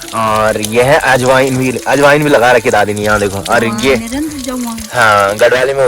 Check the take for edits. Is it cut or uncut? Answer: uncut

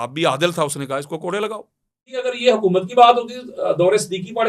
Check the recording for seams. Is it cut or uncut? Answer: cut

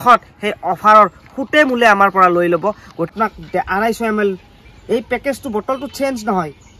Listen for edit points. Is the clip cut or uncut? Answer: cut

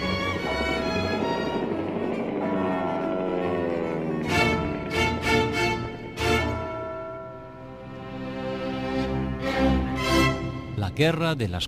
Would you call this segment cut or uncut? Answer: uncut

